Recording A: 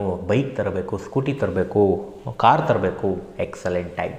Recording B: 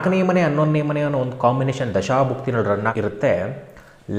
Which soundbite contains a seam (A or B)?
B